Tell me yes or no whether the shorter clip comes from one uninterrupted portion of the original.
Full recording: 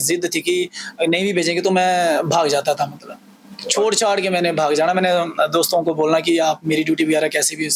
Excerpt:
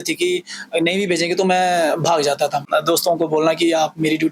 no